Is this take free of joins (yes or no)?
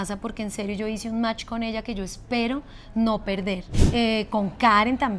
no